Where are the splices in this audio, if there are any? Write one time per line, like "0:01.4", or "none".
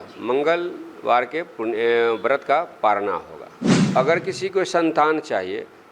0:03.8